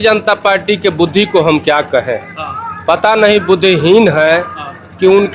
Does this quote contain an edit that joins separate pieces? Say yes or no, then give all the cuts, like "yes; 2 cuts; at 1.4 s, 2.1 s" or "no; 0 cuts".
no; 0 cuts